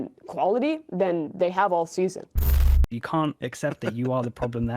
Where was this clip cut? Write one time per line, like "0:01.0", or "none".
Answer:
0:02.7